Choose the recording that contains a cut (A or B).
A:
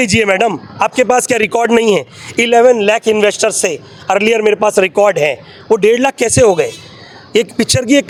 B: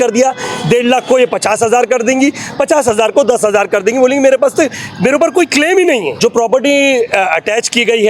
B